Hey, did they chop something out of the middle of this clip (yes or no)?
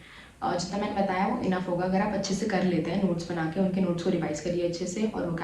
no